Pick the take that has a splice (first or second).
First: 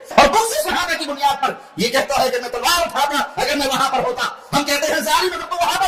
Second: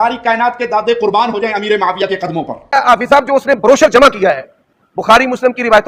second